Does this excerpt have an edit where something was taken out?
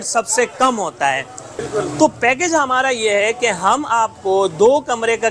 yes; 1 cut; at 1.5 s

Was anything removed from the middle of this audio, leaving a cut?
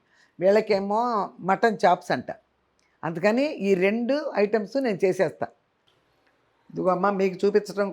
yes; 1 cut; at 5.9 s

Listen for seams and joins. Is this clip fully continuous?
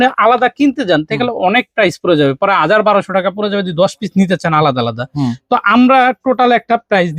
yes; 0 cuts

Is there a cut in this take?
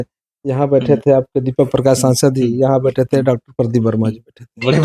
no; 0 cuts

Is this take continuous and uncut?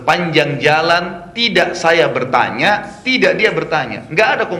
yes; 0 cuts

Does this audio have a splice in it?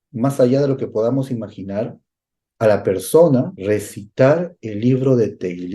yes; 1 cut; at 3.5 s

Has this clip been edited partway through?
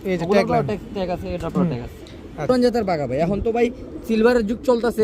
yes; 1 cut; at 2.5 s

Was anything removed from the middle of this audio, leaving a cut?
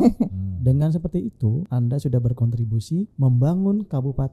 yes; 2 cuts; at 1.7 s, 3.1 s

